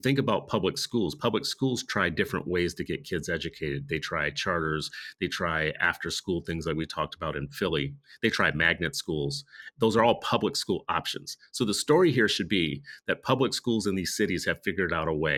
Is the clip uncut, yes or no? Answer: yes